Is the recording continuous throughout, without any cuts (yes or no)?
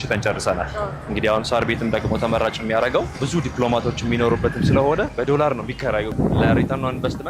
no